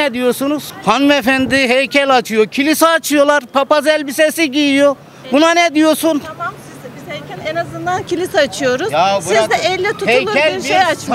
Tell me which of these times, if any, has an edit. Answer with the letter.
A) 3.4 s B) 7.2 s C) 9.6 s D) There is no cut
D